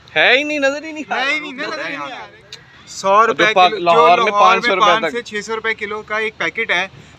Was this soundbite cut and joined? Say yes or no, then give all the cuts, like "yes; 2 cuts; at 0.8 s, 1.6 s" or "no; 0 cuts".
yes; 1 cut; at 2.3 s